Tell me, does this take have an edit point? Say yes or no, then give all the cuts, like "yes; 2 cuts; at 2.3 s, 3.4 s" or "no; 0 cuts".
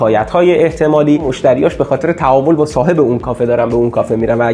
yes; 1 cut; at 1.3 s